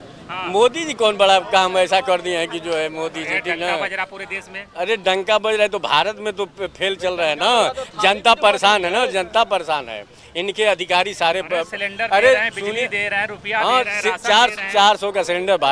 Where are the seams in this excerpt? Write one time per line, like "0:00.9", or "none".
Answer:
none